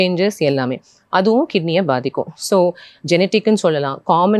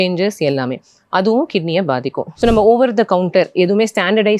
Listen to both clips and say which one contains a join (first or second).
second